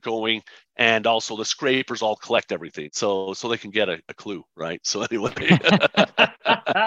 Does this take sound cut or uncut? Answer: cut